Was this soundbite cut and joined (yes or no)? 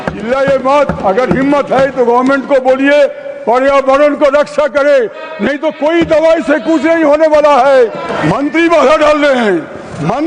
yes